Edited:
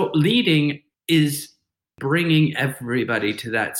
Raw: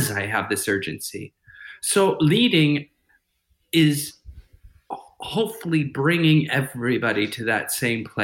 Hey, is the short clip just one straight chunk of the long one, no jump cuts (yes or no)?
no